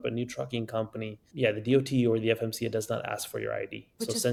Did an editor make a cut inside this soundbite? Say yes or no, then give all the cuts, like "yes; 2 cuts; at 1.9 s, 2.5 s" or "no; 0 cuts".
no; 0 cuts